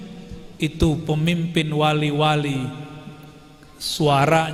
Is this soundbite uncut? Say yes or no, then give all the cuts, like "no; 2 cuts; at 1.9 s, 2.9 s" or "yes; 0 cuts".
yes; 0 cuts